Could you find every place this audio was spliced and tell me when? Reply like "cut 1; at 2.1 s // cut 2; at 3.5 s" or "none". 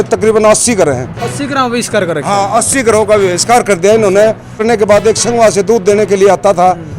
cut 1; at 4.6 s